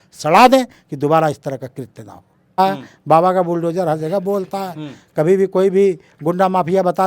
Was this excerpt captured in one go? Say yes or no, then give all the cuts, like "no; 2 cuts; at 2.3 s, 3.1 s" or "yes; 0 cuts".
no; 1 cut; at 2.6 s